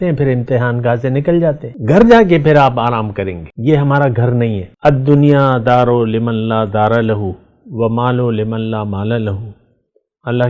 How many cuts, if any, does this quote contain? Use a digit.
3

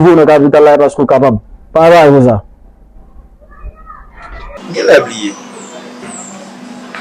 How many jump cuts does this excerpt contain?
1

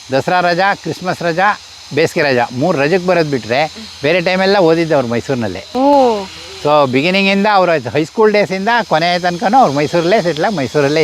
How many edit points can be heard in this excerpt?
0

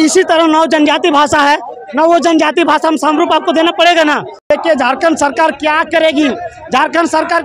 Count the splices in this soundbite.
1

